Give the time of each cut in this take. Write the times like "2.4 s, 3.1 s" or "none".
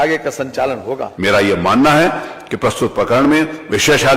1.1 s